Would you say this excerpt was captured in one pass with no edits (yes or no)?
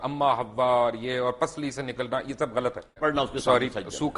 no